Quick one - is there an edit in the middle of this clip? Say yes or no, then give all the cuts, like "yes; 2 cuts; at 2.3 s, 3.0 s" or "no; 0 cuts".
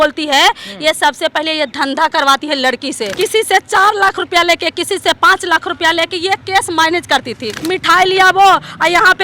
yes; 2 cuts; at 3.1 s, 7.5 s